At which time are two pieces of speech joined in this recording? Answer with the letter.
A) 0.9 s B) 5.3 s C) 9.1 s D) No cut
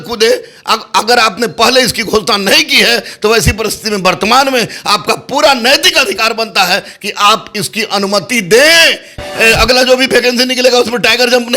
C